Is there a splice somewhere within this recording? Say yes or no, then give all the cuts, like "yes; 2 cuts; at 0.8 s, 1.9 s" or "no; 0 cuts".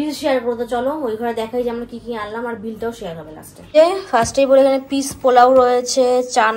no; 0 cuts